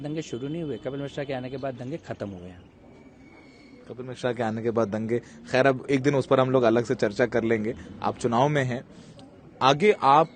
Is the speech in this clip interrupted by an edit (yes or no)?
no